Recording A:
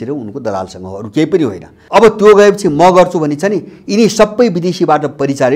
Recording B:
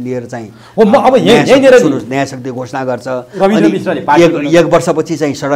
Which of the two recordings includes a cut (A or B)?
A